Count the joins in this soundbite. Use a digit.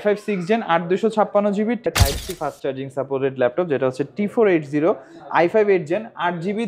1